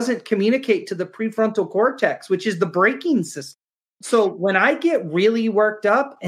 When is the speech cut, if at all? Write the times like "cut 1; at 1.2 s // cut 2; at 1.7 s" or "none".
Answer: cut 1; at 3.9 s